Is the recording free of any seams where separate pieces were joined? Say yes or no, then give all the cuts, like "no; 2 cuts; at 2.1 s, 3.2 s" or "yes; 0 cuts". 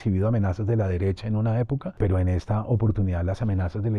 no; 1 cut; at 2.0 s